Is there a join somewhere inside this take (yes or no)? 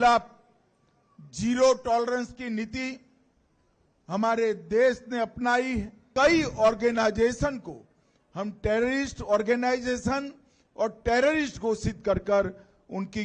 yes